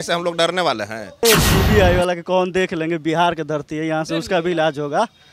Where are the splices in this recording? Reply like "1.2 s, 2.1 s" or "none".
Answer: 1.2 s